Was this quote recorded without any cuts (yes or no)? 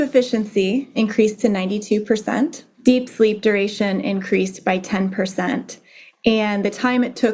no